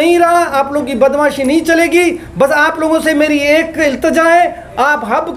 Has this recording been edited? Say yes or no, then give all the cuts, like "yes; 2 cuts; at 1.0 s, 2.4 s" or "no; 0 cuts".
no; 0 cuts